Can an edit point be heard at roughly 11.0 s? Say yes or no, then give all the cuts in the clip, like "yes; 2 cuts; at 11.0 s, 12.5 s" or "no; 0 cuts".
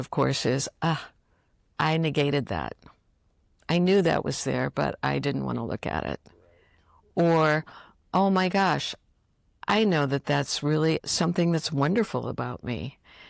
yes; 1 cut; at 11.0 s